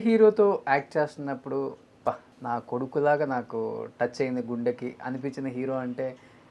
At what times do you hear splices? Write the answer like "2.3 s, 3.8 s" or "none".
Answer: 2.3 s